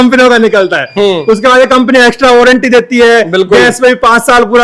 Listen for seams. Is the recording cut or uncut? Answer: uncut